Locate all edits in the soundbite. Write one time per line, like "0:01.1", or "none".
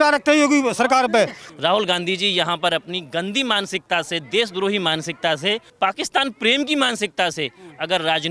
0:01.4
0:05.7